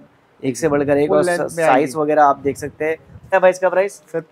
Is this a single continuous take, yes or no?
no